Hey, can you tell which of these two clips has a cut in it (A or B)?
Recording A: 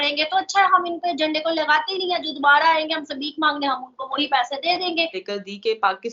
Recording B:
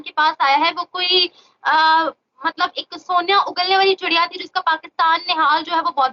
A